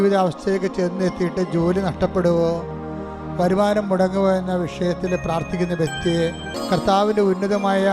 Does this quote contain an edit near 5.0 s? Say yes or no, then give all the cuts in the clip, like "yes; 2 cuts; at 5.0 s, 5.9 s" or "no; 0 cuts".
no; 1 cut; at 6.5 s